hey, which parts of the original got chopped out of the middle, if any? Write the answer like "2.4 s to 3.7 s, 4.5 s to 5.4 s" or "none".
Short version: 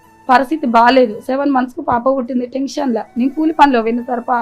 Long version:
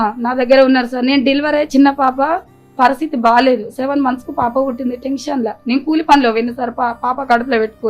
none

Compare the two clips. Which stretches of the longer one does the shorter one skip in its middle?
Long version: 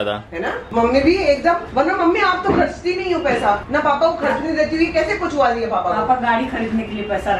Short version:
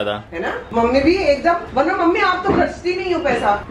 none

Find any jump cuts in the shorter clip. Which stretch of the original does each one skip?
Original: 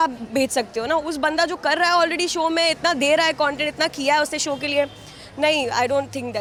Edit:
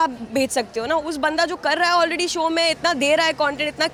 none

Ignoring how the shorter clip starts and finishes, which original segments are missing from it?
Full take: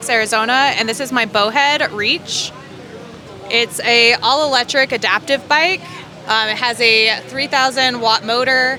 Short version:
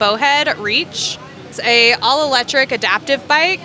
2.9 s to 3.7 s

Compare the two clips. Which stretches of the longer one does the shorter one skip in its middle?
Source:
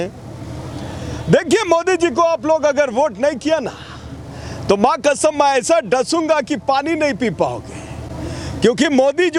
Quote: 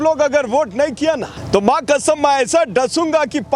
3.8 s to 4.5 s

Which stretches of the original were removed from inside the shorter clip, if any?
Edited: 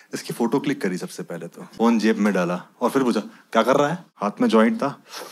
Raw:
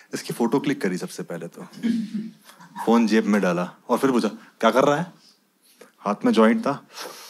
1.6 s to 2.6 s, 5.1 s to 5.9 s

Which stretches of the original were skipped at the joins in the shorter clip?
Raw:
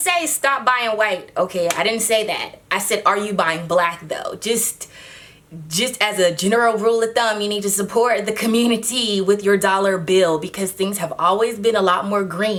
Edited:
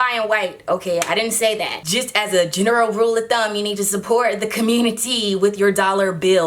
2.5 s to 5.7 s

